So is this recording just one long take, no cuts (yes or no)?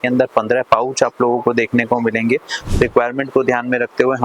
no